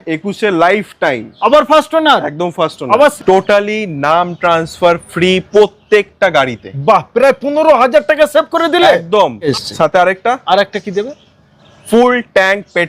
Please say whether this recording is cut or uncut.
cut